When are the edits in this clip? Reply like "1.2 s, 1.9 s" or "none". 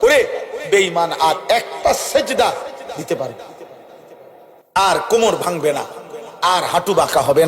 4.5 s